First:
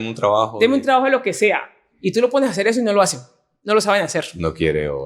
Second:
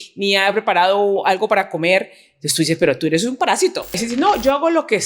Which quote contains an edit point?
second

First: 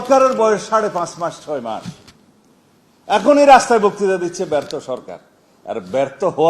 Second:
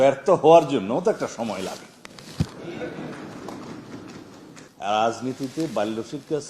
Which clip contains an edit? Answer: second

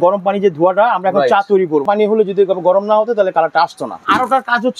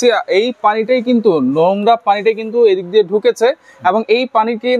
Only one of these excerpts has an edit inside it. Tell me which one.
first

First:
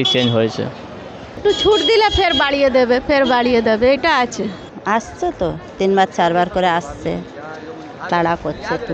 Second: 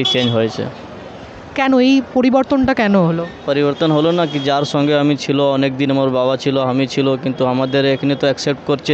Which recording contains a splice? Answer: first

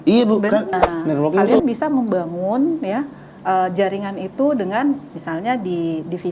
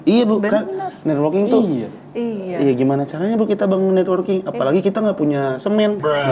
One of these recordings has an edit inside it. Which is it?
first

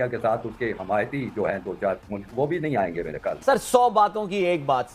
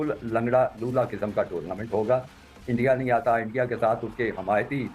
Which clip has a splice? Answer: first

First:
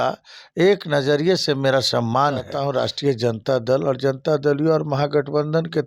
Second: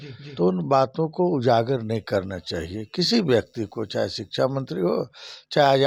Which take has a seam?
first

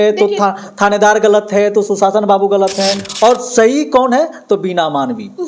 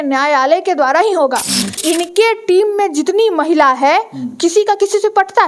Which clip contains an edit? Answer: second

